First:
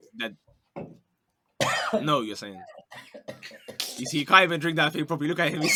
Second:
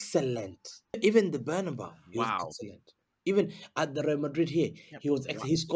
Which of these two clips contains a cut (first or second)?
second